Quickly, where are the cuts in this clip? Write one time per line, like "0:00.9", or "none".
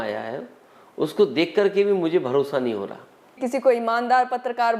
0:03.4